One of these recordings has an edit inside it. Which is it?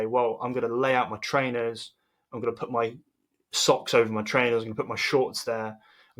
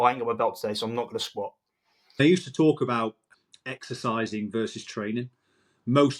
second; 2 cuts; at 2.2 s, 3.3 s

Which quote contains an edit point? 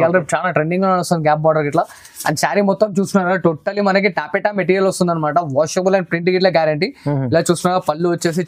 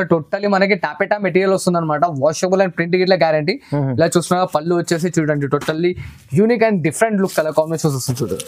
second; 1 cut; at 7.3 s

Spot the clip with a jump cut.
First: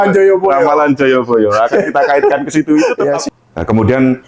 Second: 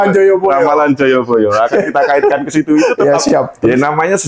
first; 1 cut; at 3.2 s

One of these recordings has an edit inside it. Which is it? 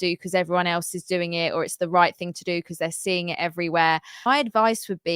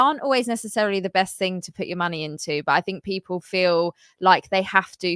first; 1 cut; at 4.3 s

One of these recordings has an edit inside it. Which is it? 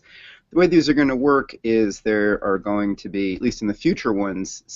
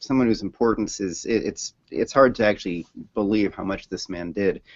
first; 1 cut; at 3.0 s

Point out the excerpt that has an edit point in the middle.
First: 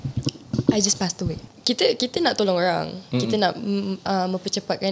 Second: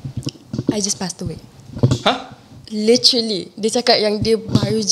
first; 1 cut; at 1.5 s

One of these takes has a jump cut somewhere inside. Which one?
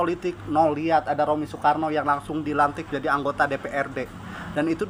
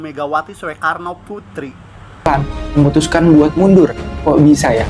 second; 1 cut; at 2.3 s

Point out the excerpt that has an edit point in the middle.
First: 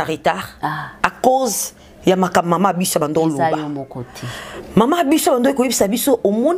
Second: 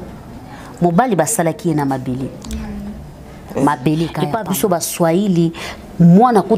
second; 1 cut; at 4.3 s

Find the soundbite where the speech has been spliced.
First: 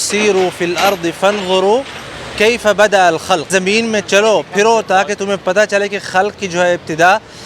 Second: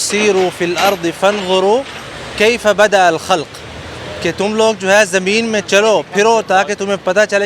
first; 1 cut; at 3.5 s

